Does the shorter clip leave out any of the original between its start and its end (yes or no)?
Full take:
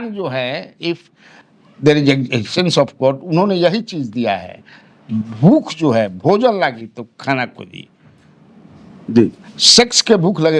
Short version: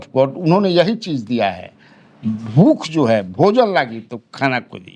no